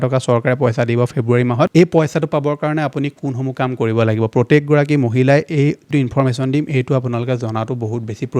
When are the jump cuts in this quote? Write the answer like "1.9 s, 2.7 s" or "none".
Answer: 1.7 s